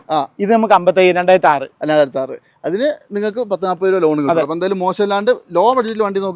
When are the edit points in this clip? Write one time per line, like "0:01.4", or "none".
none